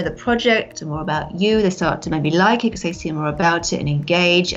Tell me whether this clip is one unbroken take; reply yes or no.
yes